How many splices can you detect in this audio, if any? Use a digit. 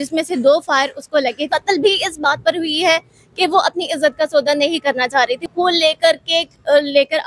2